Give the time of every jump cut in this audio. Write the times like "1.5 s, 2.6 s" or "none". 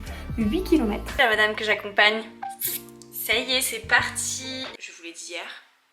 1.2 s, 4.7 s